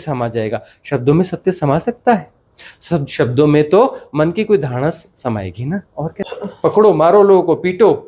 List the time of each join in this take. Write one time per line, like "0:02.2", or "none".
0:06.3